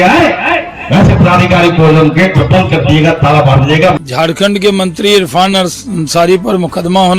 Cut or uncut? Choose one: cut